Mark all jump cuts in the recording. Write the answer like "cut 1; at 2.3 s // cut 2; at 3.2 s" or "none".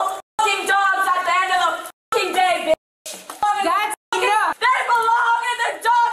cut 1; at 3.4 s // cut 2; at 4.6 s